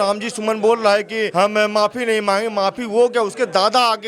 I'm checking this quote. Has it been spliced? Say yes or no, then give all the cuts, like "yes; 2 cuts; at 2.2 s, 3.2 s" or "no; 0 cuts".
yes; 1 cut; at 1.3 s